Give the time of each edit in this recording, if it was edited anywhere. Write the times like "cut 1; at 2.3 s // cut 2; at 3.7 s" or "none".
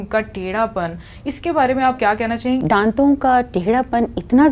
cut 1; at 2.6 s

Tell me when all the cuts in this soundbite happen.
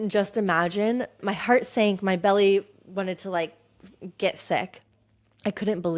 cut 1; at 1.1 s

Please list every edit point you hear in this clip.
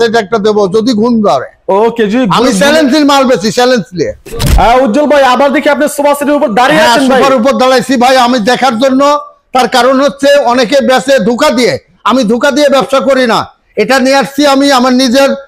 cut 1; at 4.2 s

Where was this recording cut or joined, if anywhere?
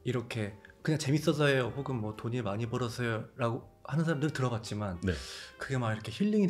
none

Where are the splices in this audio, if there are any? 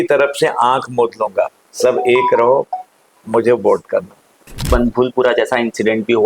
cut 1; at 4.7 s

